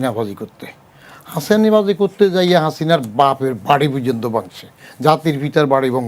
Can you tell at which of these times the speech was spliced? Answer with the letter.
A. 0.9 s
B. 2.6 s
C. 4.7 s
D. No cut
D